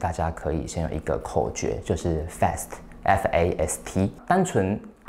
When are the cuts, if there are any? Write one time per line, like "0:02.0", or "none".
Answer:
0:04.2